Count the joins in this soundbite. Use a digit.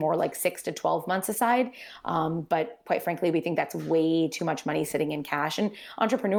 0